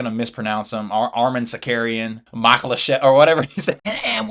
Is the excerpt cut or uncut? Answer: cut